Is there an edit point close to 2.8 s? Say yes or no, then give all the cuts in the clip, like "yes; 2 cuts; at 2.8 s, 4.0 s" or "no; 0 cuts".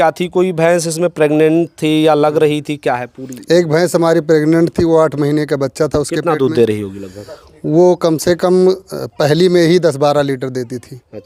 no; 0 cuts